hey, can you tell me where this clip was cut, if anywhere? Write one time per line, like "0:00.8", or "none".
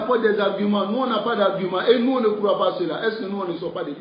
none